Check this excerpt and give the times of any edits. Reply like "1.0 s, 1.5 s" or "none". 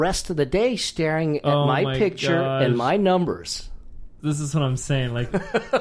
4.1 s